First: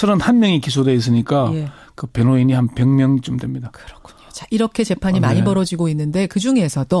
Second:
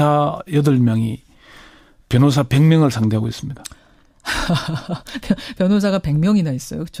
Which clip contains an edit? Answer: first; 1 cut; at 5.3 s

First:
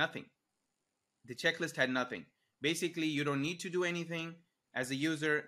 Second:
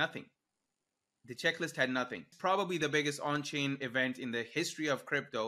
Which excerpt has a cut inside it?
second; 1 cut; at 2.3 s

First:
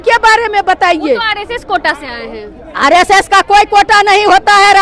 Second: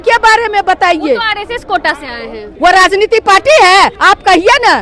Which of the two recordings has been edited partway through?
second; 2 cuts; at 2.4 s, 4.0 s

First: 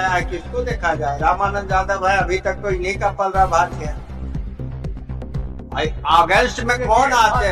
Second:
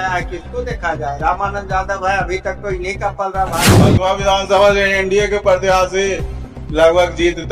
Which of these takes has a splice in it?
second; 1 cut; at 3.8 s

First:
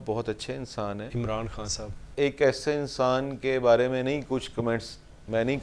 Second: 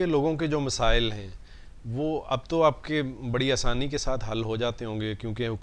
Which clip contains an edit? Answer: first; 2 cuts; at 1.1 s, 2.1 s

